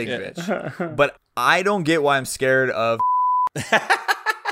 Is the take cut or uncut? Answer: cut